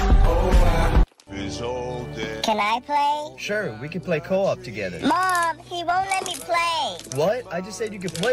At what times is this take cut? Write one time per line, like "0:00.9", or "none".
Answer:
0:01.0